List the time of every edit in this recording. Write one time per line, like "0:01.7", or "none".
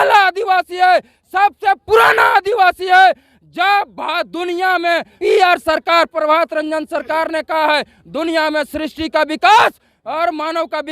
0:05.1